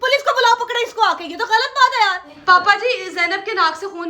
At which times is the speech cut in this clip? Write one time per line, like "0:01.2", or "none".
0:02.3